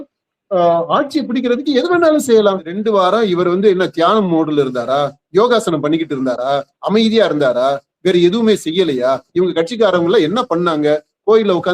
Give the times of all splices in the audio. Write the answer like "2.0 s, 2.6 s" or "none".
2.8 s